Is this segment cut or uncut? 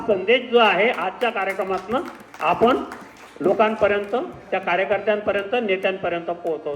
uncut